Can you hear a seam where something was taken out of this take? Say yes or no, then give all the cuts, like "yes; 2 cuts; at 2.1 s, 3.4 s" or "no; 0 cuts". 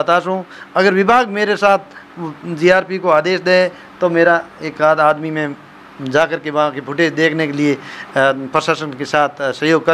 no; 0 cuts